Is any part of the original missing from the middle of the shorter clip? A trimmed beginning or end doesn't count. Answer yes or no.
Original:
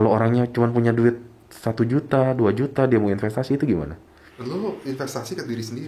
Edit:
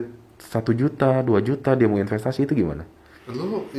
no